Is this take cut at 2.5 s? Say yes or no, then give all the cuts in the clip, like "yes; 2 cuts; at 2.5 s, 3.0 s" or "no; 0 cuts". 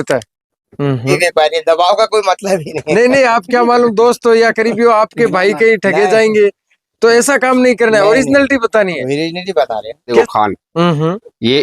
no; 2 cuts; at 1.1 s, 10.1 s